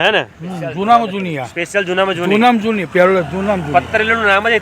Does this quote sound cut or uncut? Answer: uncut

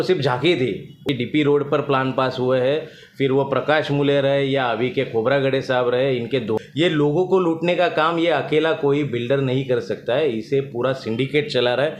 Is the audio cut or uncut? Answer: cut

